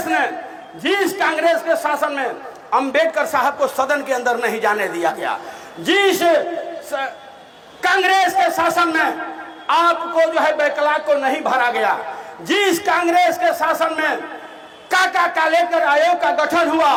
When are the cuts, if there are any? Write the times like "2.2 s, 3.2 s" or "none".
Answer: none